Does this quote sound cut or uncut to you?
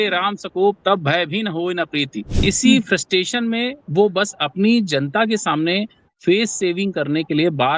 cut